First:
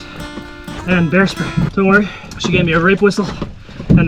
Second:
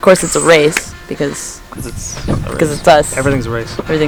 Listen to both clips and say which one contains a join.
first; 2 cuts; at 1.7 s, 2.3 s

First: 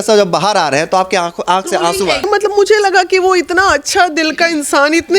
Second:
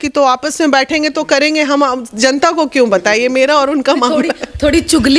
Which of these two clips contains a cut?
first; 1 cut; at 2.2 s

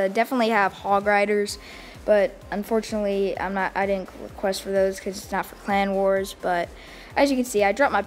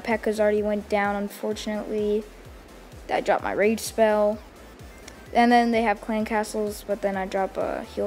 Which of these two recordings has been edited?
first; 1 cut; at 4.6 s

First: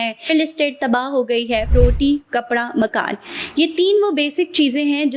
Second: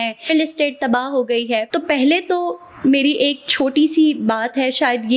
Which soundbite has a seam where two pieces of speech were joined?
first; 1 cut; at 1.7 s

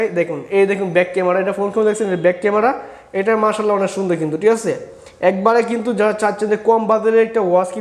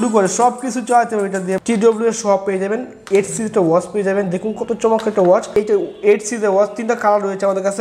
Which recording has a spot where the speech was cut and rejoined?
second; 2 cuts; at 1.5 s, 5.6 s

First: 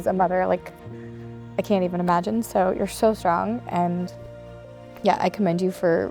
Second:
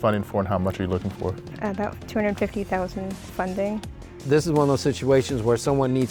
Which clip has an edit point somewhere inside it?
second; 2 cuts; at 1.5 s, 4.2 s

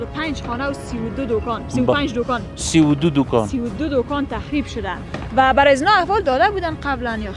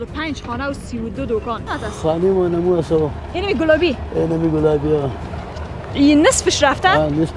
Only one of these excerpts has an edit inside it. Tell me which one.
second; 1 cut; at 1.6 s

